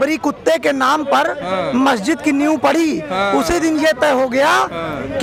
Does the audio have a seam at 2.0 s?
no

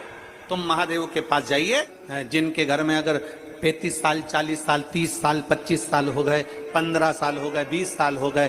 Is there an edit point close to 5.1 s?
no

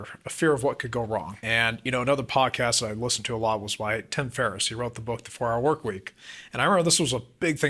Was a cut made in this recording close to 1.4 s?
yes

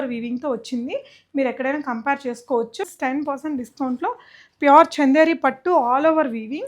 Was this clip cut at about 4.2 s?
no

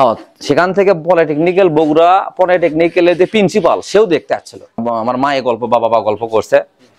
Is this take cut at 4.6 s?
yes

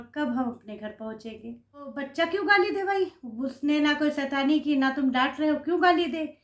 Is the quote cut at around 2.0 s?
yes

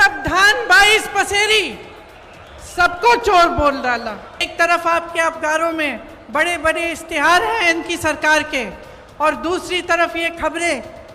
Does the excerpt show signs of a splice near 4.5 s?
yes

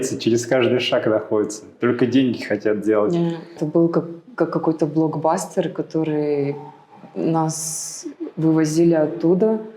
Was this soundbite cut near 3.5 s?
yes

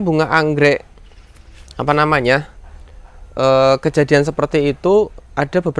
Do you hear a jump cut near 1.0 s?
no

